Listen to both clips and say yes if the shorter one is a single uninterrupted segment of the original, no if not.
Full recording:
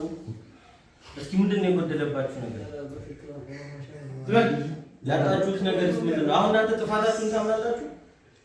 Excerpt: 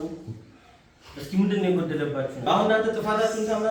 no